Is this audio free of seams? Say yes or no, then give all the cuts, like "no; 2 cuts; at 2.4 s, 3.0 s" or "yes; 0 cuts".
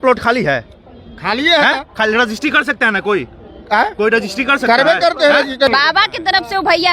no; 1 cut; at 5.7 s